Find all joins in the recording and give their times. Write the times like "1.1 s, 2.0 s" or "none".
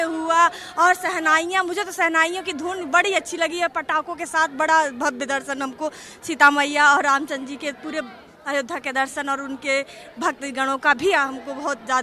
none